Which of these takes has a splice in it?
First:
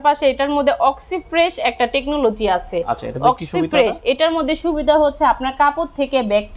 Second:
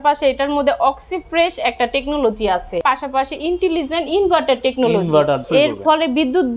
second; 2 cuts; at 2.8 s, 5.4 s

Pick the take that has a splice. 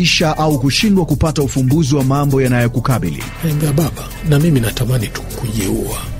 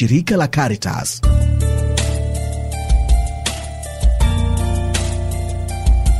second; 1 cut; at 1.1 s

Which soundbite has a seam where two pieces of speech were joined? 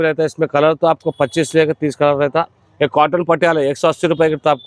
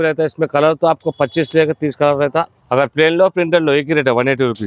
second; 1 cut; at 2.6 s

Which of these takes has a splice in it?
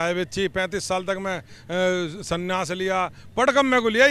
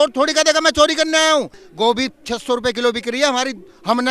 second; 1 cut; at 1.6 s

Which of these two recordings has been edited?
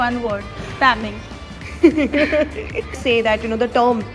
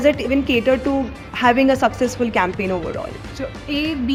first; 1 cut; at 2.9 s

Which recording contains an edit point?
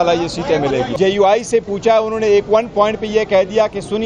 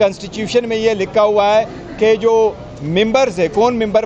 first; 1 cut; at 0.9 s

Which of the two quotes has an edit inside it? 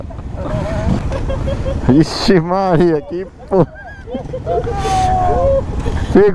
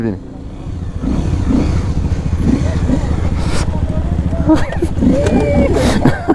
first; 1 cut; at 1.0 s

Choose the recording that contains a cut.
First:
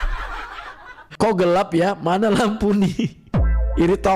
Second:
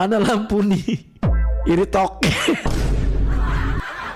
first; 1 cut; at 1.1 s

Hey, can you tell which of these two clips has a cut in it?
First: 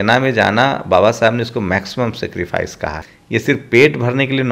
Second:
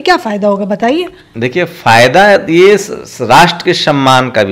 first; 1 cut; at 3.1 s

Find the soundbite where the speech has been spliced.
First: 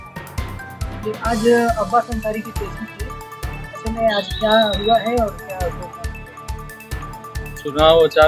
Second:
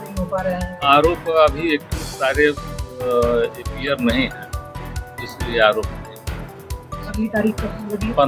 first; 1 cut; at 1.0 s

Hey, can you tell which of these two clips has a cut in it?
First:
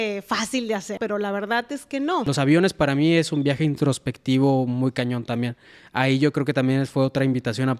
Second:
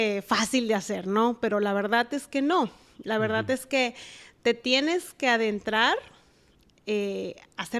first; 2 cuts; at 1.0 s, 2.3 s

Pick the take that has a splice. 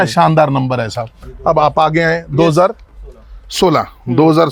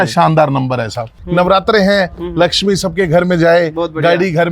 second; 1 cut; at 1.2 s

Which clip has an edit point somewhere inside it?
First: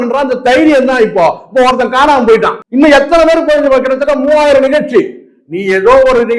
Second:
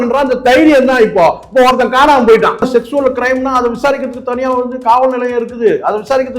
second; 1 cut; at 2.6 s

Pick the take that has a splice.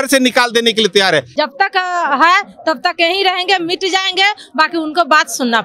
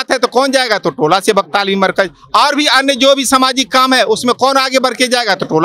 first; 1 cut; at 1.3 s

